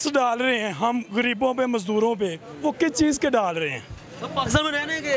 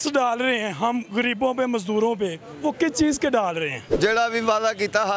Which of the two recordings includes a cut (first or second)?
second